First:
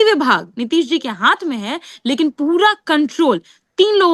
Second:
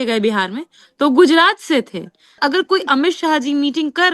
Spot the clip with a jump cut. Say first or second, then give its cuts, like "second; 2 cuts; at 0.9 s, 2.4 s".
second; 1 cut; at 2.4 s